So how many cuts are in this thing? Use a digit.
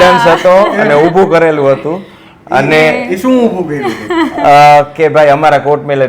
0